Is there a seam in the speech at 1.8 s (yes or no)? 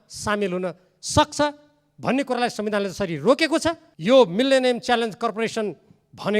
no